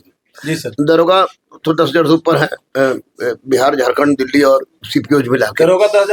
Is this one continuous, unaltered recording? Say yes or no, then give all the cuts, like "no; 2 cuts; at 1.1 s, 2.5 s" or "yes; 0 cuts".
yes; 0 cuts